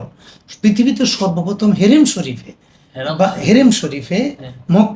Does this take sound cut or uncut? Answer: uncut